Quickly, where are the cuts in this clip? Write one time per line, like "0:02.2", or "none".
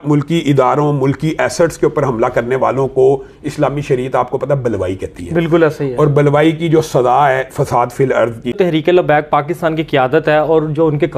0:08.6